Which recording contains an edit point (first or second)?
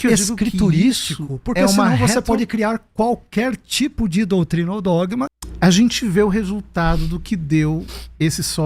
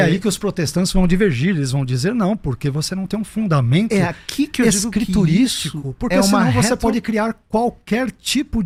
first